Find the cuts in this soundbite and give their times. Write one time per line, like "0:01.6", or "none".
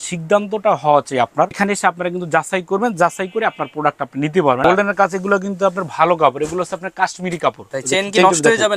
0:01.6
0:04.6
0:07.7

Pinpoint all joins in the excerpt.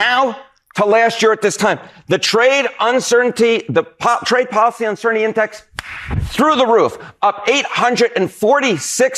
none

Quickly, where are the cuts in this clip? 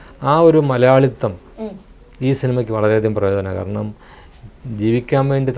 none

